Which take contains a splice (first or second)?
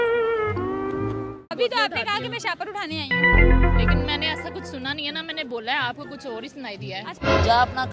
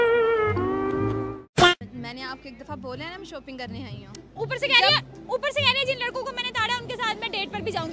first